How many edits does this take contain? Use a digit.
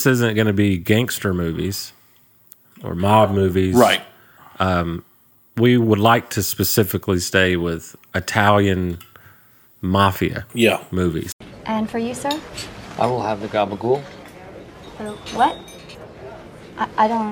0